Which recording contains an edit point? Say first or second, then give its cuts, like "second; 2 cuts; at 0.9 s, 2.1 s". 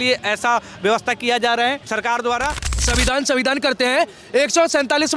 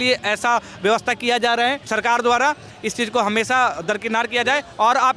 first; 1 cut; at 2.8 s